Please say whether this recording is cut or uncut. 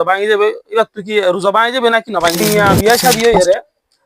cut